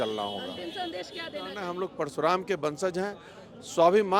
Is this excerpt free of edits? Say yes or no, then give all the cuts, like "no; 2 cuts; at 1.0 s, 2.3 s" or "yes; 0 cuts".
no; 1 cut; at 1.6 s